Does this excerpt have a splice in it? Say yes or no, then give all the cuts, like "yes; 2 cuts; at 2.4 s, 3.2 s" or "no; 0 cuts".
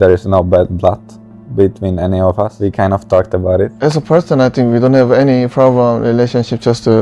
yes; 1 cut; at 2.5 s